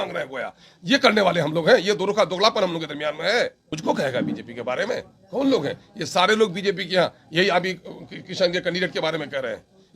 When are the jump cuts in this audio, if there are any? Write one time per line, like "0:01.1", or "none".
0:03.7